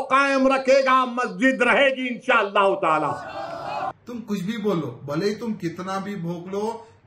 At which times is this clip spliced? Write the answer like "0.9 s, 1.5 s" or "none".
3.9 s